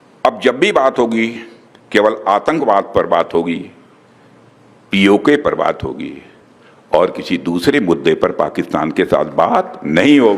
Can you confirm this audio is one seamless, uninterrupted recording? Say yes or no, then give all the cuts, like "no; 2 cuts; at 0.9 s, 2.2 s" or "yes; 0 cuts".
yes; 0 cuts